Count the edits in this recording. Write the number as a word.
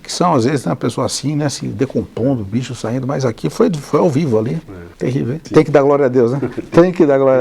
one